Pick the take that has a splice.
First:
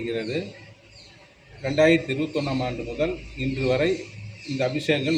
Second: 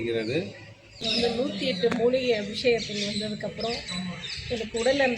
second; 1 cut; at 1.2 s

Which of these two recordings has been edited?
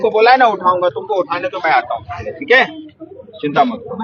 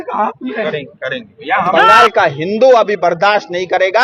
second; 1 cut; at 1.8 s

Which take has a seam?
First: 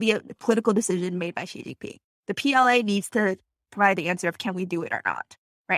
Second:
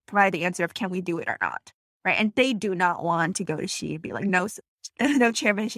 second; 1 cut; at 4.6 s

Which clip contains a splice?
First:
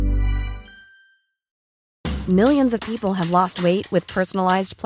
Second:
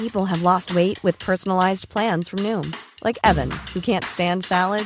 first; 1 cut; at 1.6 s

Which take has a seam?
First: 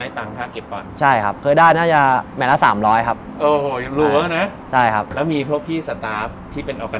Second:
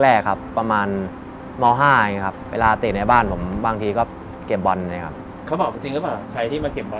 first; 2 cuts; at 1.4 s, 5.1 s

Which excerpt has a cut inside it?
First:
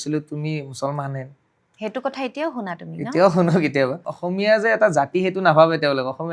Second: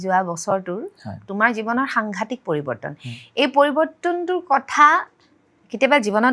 first; 1 cut; at 4.1 s

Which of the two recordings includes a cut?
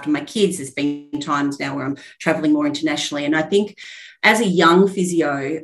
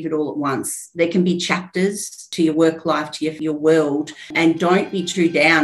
second; 3 cuts; at 2.2 s, 3.4 s, 4.3 s

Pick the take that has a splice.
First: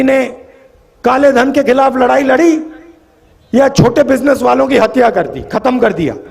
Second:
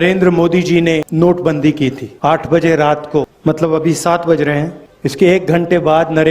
second; 4 cuts; at 1.1 s, 2.1 s, 3.3 s, 4.8 s

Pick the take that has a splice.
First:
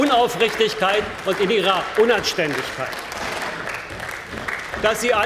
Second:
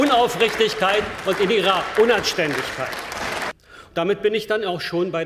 second; 1 cut; at 3.6 s

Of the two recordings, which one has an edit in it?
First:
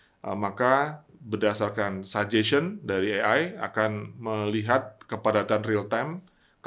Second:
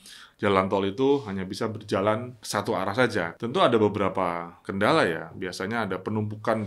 second; 3 cuts; at 2.4 s, 3.3 s, 4.6 s

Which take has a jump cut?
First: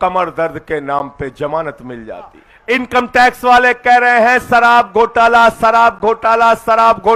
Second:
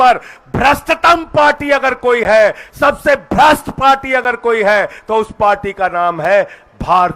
first; 1 cut; at 2.5 s

